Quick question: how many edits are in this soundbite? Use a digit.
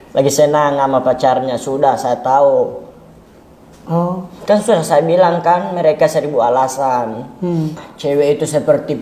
1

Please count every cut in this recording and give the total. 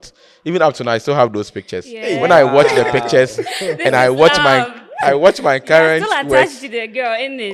0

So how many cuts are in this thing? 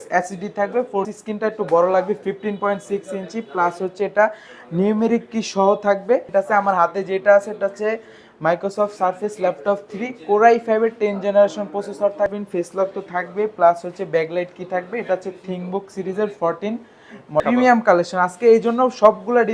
4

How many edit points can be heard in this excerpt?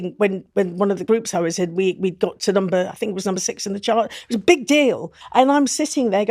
2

